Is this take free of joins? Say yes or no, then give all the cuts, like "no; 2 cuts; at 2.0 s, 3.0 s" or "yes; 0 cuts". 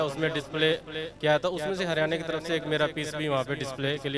yes; 0 cuts